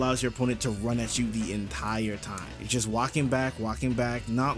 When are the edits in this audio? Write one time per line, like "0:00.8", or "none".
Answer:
0:02.6